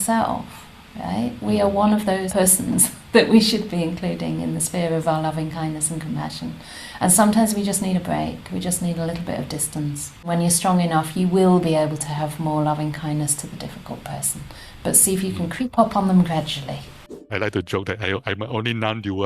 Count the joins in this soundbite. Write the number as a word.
three